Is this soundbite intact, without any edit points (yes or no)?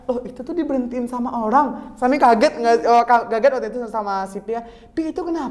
yes